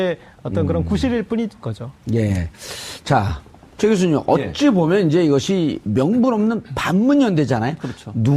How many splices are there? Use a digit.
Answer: 1